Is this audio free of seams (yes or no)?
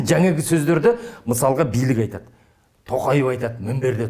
yes